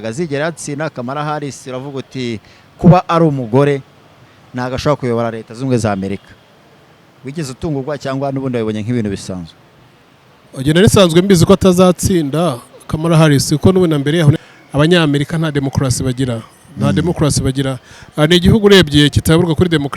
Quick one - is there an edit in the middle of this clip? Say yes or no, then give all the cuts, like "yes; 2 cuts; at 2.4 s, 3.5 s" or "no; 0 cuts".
yes; 1 cut; at 14.4 s